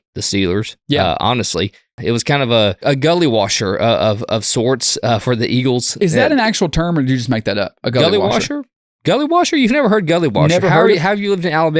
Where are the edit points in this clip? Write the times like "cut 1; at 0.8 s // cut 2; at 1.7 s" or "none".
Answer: cut 1; at 2.0 s // cut 2; at 2.8 s